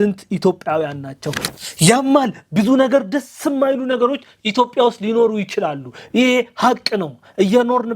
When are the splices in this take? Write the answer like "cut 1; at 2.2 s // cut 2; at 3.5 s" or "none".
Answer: cut 1; at 1.4 s